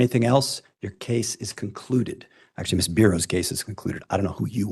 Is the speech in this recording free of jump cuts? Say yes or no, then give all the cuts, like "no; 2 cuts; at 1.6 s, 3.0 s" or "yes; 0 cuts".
yes; 0 cuts